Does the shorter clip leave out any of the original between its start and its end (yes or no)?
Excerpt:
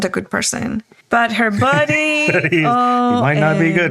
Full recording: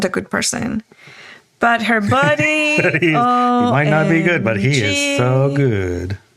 yes